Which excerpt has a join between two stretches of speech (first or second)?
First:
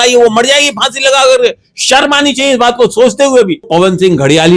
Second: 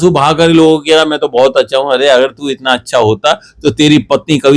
first